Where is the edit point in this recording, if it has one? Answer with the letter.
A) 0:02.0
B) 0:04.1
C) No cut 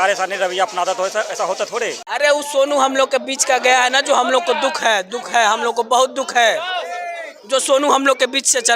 A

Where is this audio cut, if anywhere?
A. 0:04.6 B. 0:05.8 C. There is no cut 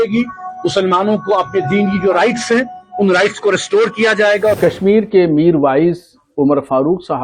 A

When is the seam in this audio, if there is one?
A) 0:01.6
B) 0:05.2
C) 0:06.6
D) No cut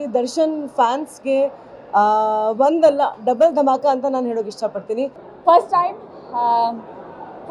B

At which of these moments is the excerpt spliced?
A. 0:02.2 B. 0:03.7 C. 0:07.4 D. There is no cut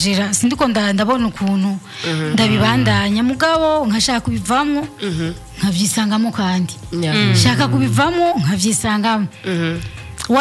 D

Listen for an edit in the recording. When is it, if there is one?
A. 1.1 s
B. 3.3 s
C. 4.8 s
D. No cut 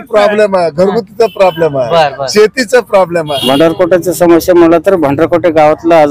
B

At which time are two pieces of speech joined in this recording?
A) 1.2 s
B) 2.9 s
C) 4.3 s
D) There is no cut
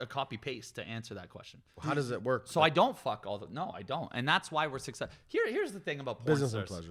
D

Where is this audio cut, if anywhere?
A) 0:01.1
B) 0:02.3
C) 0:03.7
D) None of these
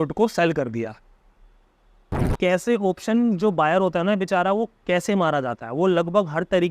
B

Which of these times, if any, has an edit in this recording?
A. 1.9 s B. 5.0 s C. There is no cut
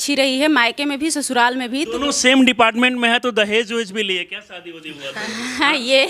A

